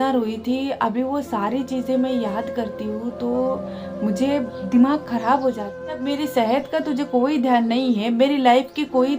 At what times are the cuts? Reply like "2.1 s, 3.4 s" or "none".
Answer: 6.0 s

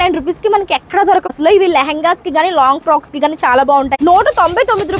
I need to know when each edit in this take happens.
1.3 s, 3.9 s

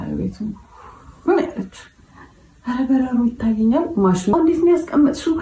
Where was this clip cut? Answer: 4.3 s

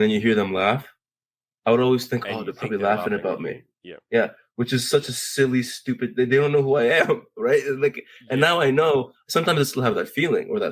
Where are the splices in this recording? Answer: none

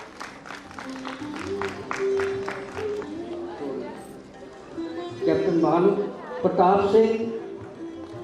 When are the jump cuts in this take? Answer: 3.0 s

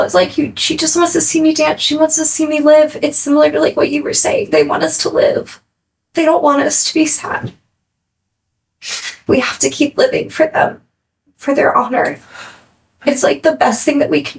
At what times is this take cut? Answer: none

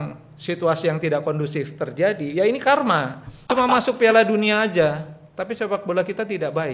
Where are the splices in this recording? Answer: 3.4 s

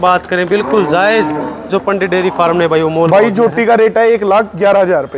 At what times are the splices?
none

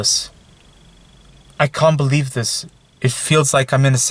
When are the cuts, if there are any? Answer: none

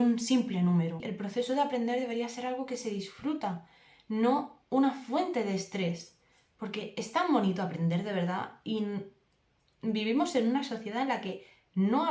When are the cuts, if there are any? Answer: 1.1 s

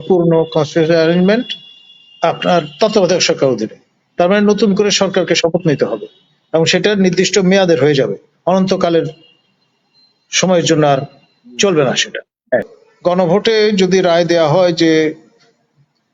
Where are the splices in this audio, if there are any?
12.8 s

